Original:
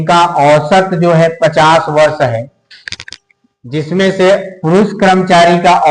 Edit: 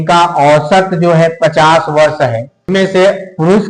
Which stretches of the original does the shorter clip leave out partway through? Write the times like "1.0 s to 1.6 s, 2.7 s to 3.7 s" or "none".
2.6 s to 3.9 s